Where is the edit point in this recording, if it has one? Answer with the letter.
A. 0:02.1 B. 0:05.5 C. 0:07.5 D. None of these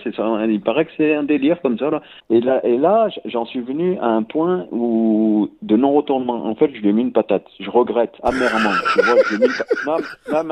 A